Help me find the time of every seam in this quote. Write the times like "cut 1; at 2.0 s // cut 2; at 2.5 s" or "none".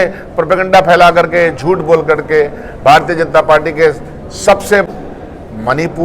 cut 1; at 4.8 s